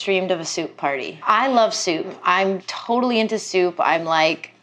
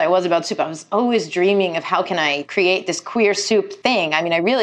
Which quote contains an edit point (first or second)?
first